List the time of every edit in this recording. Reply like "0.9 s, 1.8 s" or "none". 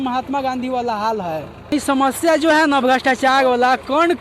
1.7 s